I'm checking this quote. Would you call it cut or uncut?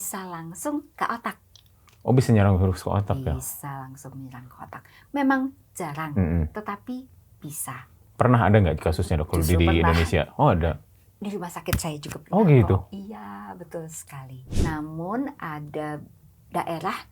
cut